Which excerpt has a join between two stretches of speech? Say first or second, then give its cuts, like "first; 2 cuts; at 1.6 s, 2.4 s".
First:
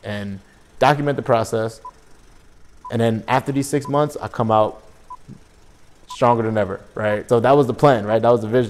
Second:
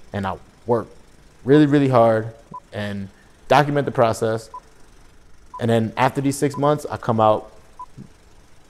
first; 1 cut; at 7.2 s